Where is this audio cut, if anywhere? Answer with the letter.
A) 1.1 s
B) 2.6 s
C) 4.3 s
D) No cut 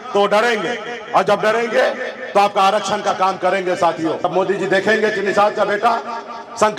C